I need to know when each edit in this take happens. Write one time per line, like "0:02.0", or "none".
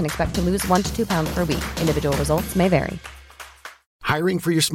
0:03.7